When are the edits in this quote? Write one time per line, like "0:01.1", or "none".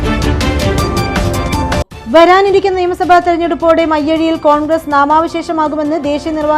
0:01.8